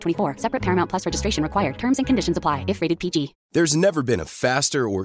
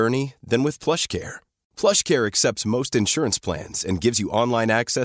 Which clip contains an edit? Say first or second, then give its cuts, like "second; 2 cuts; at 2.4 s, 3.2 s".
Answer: first; 1 cut; at 3.4 s